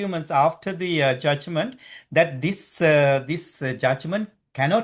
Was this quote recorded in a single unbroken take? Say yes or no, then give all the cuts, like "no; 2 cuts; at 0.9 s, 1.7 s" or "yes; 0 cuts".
yes; 0 cuts